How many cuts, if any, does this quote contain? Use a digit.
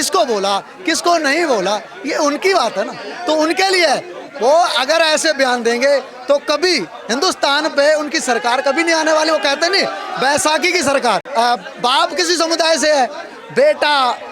1